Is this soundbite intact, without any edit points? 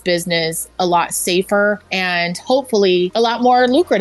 no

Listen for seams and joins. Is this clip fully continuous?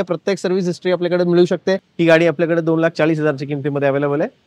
no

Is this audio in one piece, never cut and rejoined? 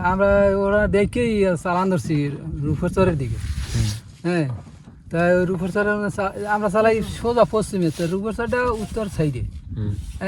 yes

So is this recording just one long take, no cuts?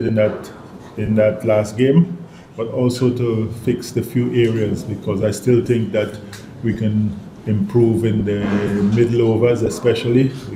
yes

